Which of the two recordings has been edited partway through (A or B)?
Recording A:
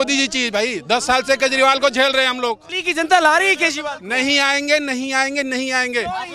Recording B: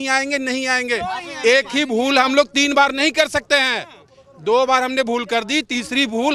A